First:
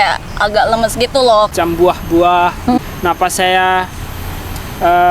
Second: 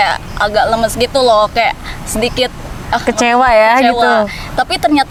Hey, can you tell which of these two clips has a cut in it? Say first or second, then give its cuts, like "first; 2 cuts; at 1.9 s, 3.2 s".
first; 2 cuts; at 1.5 s, 2.8 s